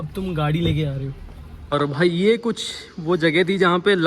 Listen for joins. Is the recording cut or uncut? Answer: cut